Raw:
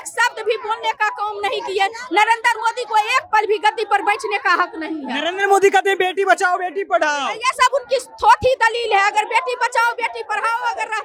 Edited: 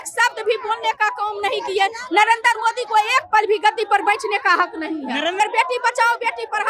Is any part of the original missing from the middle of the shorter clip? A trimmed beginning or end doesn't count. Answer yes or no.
yes